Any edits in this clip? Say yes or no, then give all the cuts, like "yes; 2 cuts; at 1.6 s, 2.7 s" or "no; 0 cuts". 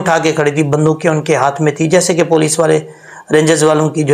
no; 0 cuts